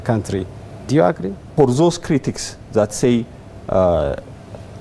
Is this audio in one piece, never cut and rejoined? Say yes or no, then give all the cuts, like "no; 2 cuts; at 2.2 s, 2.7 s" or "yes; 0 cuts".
no; 1 cut; at 1.4 s